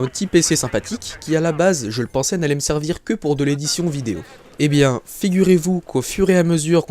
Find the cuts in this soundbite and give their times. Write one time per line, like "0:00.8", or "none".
0:02.4